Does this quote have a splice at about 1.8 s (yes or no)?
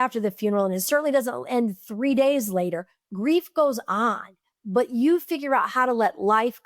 no